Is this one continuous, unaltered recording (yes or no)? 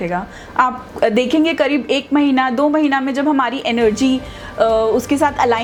yes